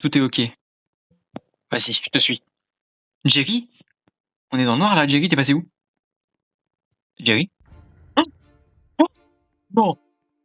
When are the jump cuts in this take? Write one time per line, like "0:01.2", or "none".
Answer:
0:01.1